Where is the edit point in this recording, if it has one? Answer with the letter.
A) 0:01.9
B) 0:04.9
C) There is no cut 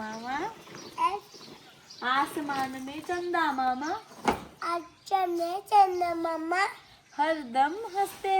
C